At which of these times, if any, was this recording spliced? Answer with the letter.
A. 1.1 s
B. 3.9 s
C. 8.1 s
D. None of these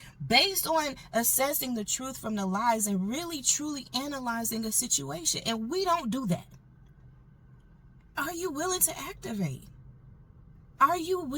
C